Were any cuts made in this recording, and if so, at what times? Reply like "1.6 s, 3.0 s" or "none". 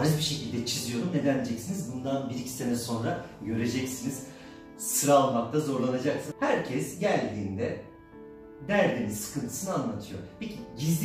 6.3 s

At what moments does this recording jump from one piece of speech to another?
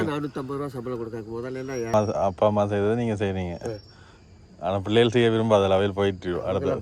1.9 s

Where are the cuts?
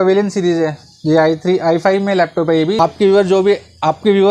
2.8 s

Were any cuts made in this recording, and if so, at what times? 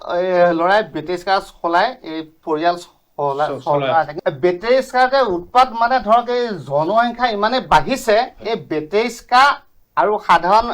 4.2 s

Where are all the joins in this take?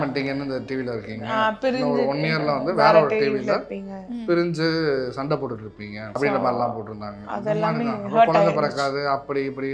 6.1 s

